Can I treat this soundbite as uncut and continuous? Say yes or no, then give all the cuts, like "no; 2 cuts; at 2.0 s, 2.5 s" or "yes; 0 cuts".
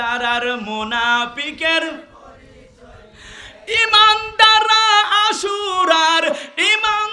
yes; 0 cuts